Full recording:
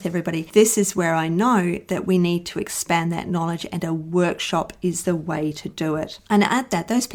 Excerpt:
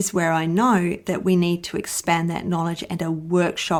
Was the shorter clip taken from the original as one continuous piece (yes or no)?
yes